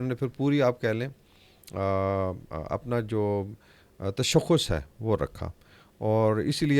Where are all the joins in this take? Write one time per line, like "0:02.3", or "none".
none